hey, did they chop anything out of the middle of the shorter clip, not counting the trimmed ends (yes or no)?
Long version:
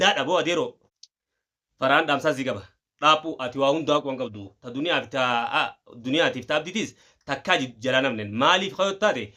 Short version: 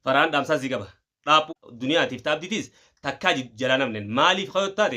yes